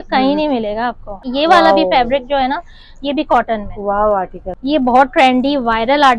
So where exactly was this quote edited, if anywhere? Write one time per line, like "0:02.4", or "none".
0:01.2
0:04.4